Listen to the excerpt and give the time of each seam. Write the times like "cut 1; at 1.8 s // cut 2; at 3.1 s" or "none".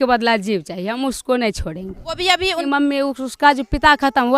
cut 1; at 2.6 s